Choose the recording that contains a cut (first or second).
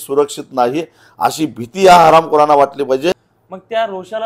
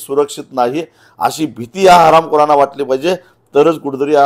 first